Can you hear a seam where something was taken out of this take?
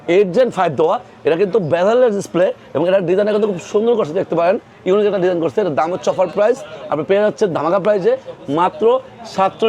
no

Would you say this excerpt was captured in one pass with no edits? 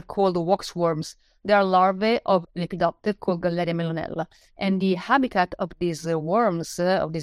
yes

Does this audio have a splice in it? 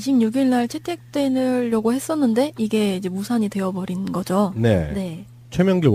yes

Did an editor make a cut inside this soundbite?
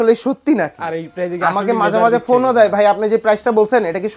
no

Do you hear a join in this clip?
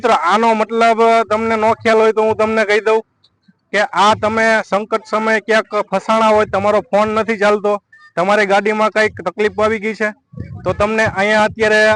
no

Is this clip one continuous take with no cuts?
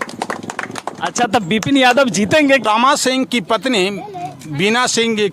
no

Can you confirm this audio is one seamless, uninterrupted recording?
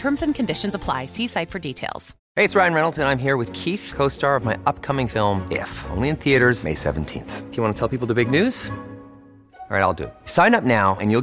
no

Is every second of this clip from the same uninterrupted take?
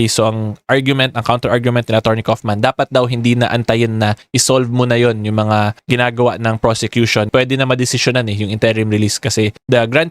no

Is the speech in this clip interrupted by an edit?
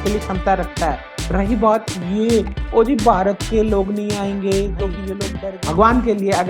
yes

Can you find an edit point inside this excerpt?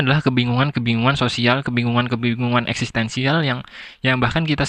no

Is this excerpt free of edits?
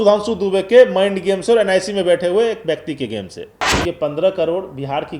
no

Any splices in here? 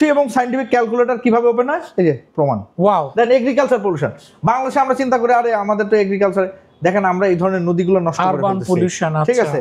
yes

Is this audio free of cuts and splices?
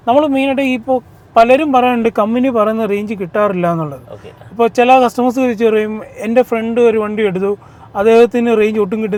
yes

